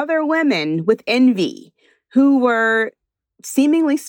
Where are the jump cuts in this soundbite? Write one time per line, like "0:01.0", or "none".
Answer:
none